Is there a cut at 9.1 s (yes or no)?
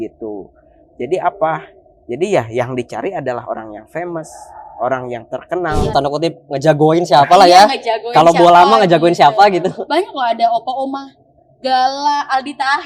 no